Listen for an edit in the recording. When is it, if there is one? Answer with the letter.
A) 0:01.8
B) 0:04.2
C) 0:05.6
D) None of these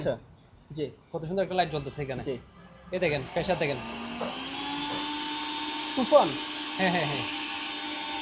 D